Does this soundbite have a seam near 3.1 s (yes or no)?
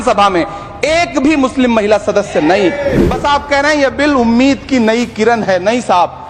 yes